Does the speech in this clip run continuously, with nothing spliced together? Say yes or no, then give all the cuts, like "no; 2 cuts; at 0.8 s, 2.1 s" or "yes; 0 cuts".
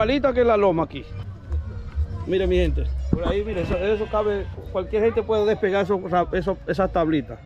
no; 1 cut; at 1.3 s